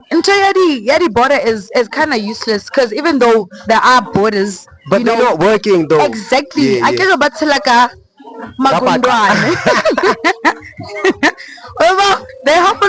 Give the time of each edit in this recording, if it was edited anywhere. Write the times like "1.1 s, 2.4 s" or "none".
none